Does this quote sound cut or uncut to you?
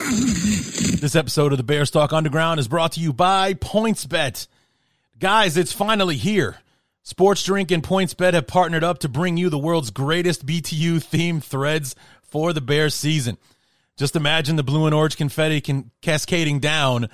cut